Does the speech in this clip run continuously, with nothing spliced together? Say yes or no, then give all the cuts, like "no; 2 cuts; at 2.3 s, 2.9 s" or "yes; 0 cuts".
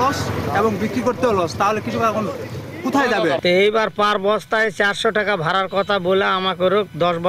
no; 1 cut; at 3.4 s